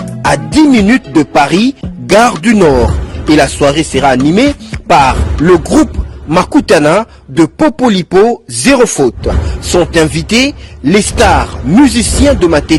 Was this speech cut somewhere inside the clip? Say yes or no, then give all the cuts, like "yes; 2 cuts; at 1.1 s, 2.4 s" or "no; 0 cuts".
no; 0 cuts